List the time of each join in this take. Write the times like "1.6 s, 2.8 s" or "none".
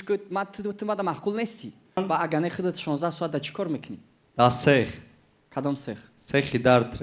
2.0 s